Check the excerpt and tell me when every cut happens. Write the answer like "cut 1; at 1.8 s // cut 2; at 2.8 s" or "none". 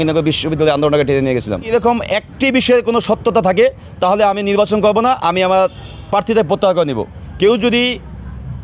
cut 1; at 1.7 s // cut 2; at 7.2 s